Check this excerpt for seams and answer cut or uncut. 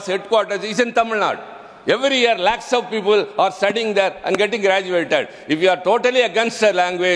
uncut